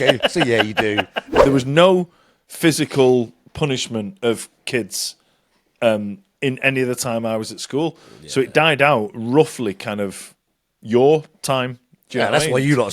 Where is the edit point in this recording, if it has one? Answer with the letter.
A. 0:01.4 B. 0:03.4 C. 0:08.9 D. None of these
A